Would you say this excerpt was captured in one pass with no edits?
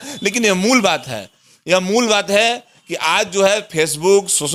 yes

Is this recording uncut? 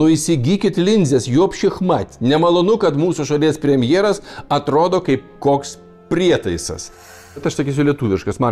no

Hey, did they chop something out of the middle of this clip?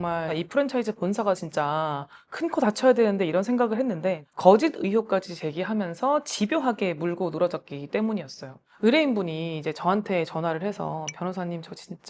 yes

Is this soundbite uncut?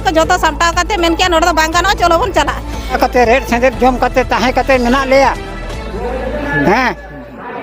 no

